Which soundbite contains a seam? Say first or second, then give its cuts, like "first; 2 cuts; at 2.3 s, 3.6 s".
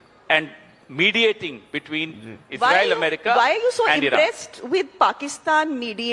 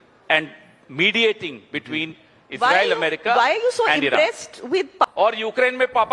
second; 1 cut; at 5.1 s